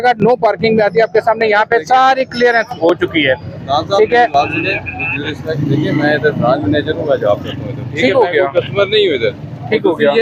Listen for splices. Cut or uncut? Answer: uncut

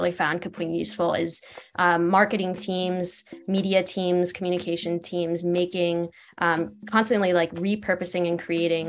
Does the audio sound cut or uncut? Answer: uncut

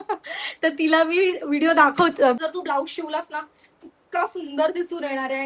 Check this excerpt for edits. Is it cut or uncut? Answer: cut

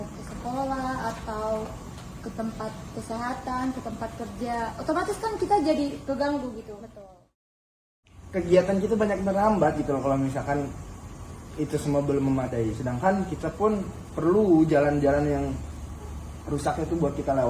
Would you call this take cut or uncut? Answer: cut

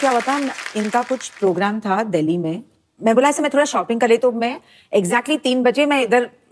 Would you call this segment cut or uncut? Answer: uncut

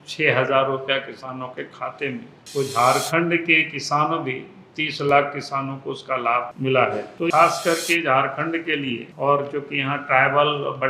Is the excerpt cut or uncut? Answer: cut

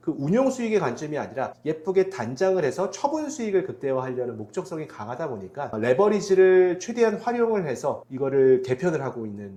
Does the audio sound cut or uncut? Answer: uncut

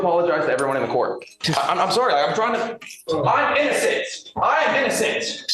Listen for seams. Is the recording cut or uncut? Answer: cut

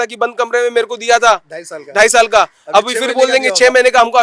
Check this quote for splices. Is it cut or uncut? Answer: uncut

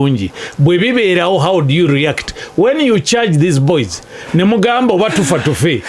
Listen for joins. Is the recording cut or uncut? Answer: uncut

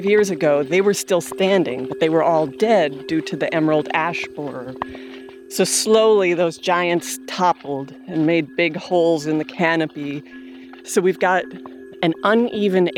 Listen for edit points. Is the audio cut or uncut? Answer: cut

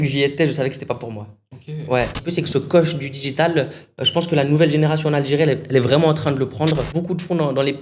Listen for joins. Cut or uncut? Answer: cut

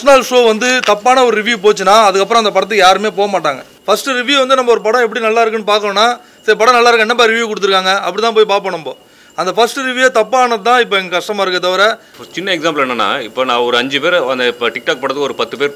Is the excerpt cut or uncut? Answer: cut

